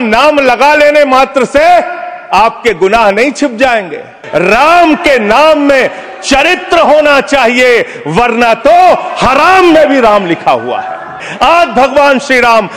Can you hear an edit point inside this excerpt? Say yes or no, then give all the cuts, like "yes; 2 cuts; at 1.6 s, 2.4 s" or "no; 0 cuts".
yes; 2 cuts; at 4.2 s, 11.3 s